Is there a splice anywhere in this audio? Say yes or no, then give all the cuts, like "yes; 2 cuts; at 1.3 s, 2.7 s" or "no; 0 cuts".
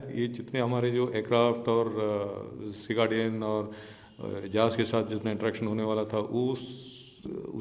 no; 0 cuts